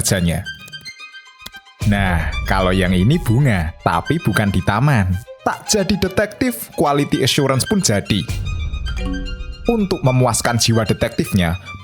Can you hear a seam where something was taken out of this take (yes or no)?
yes